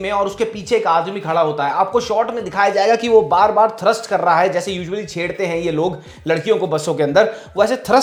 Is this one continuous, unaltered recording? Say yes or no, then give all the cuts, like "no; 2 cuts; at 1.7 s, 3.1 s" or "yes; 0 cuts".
yes; 0 cuts